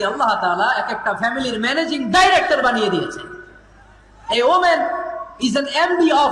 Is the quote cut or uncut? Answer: uncut